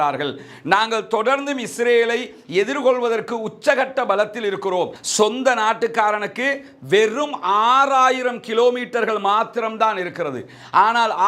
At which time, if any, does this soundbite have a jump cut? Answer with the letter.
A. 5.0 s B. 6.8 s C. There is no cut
A